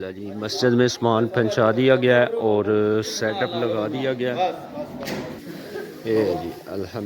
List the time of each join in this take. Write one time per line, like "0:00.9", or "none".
0:05.4